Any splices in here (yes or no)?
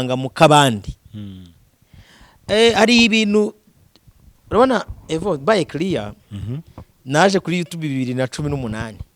no